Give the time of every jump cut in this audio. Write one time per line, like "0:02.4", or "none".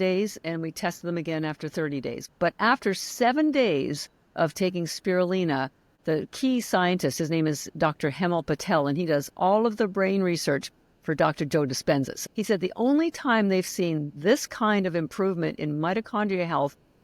0:02.2
0:05.8
0:12.1